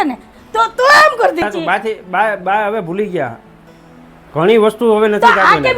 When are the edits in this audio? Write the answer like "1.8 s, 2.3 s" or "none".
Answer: 1.4 s